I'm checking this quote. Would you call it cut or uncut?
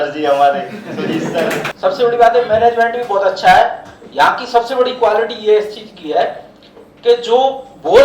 cut